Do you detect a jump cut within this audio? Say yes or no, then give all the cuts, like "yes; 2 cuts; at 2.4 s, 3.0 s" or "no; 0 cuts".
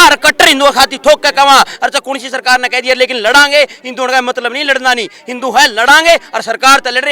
no; 0 cuts